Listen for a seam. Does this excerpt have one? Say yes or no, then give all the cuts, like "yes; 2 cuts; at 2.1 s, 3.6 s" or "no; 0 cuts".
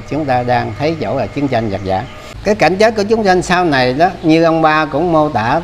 yes; 1 cut; at 2.2 s